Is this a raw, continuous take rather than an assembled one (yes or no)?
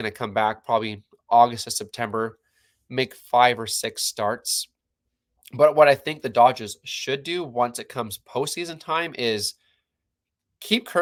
yes